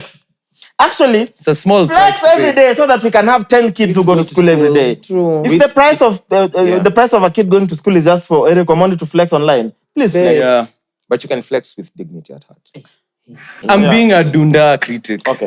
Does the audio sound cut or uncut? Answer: cut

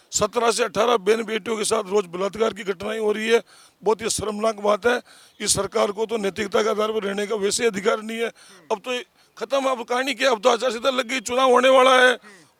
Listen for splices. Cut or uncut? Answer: uncut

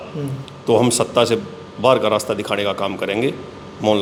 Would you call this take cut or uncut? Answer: uncut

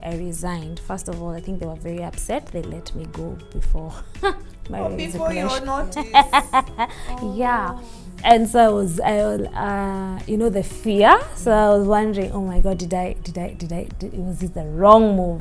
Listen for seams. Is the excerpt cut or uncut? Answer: uncut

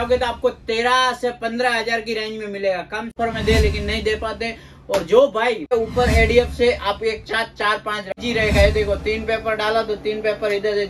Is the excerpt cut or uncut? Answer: cut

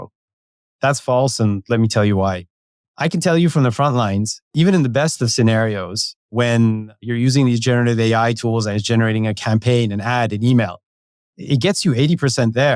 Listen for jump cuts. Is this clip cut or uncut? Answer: cut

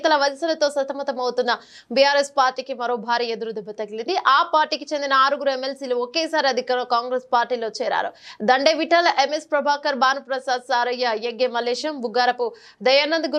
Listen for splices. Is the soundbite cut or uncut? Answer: uncut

